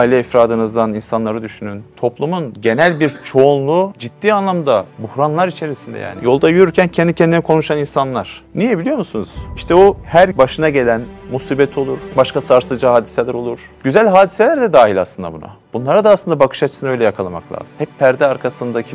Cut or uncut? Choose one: cut